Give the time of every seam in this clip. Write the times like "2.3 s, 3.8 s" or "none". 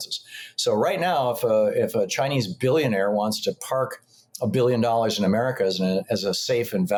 none